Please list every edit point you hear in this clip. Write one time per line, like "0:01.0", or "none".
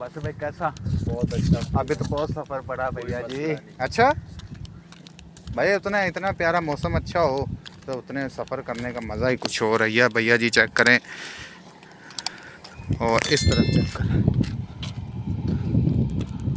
none